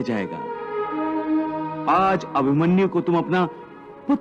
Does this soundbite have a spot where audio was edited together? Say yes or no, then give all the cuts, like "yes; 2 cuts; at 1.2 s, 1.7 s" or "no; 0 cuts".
no; 0 cuts